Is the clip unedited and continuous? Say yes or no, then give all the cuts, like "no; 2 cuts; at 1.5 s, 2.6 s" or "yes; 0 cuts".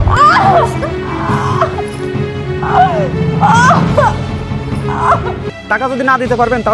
no; 1 cut; at 5.5 s